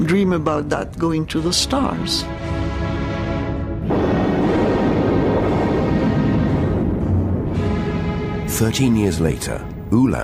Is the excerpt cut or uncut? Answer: cut